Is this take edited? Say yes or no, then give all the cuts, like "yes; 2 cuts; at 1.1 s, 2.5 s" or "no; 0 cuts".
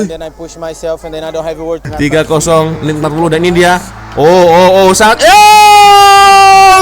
yes; 1 cut; at 1.9 s